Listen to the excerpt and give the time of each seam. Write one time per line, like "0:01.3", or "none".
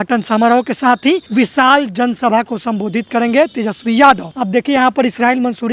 0:01.3
0:04.3